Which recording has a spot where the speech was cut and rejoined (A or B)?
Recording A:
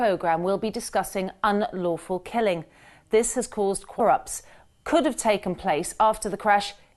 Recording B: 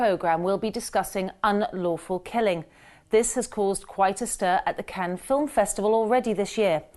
B